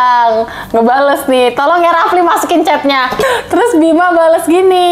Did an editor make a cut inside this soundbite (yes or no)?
yes